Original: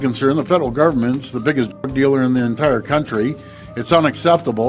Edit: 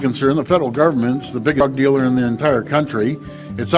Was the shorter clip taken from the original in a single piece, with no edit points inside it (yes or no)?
no